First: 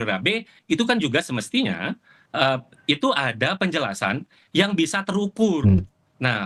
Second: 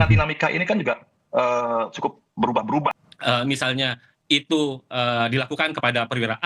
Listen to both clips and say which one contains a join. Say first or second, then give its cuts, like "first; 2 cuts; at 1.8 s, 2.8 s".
second; 1 cut; at 3.0 s